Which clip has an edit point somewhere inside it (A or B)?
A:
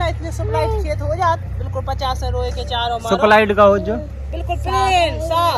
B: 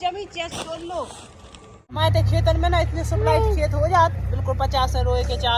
B